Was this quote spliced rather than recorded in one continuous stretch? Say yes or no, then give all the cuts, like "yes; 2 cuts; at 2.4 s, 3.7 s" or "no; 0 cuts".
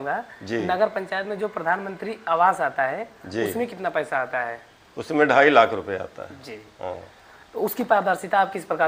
no; 0 cuts